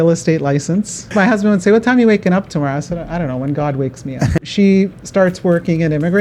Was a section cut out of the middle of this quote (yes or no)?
yes